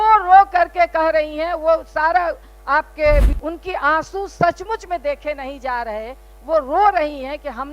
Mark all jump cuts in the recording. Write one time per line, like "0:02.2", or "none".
0:03.4